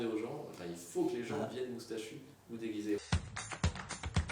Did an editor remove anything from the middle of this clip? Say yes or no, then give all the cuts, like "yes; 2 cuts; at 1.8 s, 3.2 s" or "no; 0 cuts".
yes; 1 cut; at 3.0 s